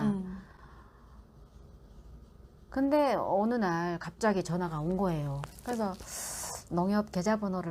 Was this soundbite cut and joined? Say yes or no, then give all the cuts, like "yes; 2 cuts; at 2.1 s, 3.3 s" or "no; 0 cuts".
yes; 1 cut; at 5.5 s